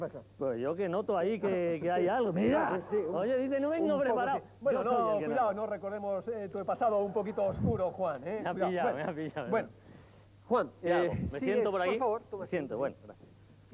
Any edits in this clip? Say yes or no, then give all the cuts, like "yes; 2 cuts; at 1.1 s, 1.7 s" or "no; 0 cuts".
no; 0 cuts